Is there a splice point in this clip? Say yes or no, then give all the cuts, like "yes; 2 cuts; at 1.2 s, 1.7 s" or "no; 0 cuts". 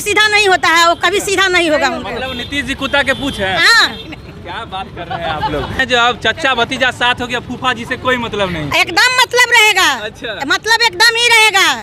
yes; 1 cut; at 5.8 s